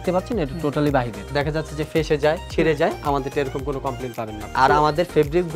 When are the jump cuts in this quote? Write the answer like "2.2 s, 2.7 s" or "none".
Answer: 1.2 s, 4.4 s